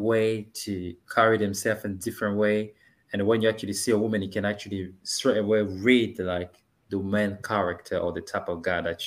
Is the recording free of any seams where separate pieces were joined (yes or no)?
yes